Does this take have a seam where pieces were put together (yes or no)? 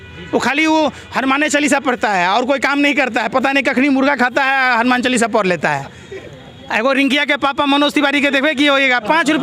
no